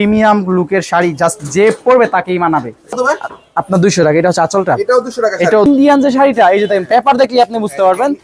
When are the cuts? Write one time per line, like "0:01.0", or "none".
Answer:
0:03.0
0:05.7